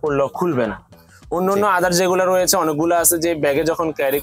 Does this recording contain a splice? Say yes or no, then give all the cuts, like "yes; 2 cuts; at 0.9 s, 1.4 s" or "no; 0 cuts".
no; 0 cuts